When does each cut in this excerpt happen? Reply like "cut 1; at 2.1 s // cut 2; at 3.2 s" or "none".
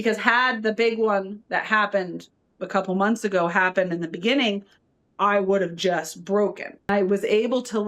cut 1; at 6.9 s